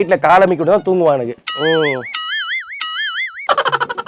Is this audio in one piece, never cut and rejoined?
yes; 0 cuts

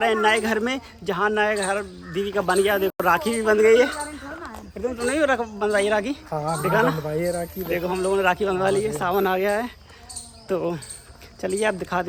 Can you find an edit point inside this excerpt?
no; 0 cuts

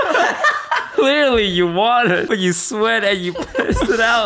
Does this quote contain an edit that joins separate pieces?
yes; 2 cuts; at 0.9 s, 2.3 s

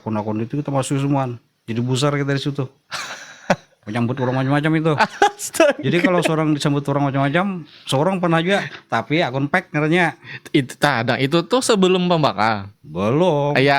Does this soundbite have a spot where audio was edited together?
no; 0 cuts

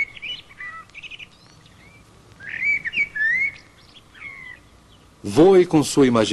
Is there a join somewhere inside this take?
no; 0 cuts

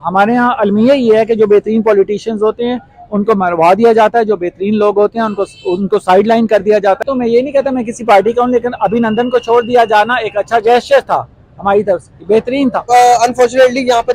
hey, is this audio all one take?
no; 2 cuts; at 7.0 s, 12.8 s

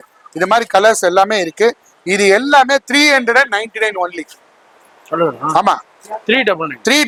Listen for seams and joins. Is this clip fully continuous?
yes; 0 cuts

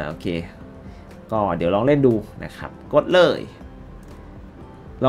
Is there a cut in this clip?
no; 0 cuts

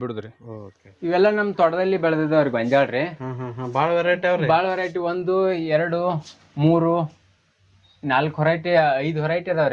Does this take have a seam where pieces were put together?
yes; 1 cut; at 1.1 s

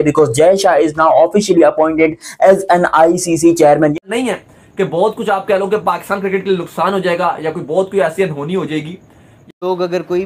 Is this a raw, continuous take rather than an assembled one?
no; 2 cuts; at 4.0 s, 9.3 s

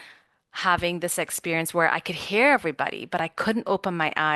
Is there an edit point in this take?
no; 0 cuts

